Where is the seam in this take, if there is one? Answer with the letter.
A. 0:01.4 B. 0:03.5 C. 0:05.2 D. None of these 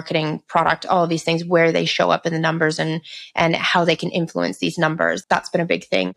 C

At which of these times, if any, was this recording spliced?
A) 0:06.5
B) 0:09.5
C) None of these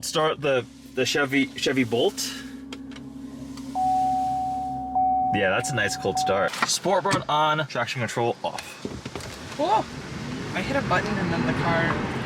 A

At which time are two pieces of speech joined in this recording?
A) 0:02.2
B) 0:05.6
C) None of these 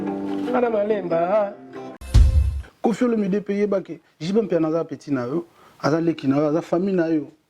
A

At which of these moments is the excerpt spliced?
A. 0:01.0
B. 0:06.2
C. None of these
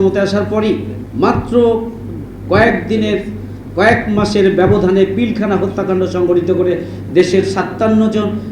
A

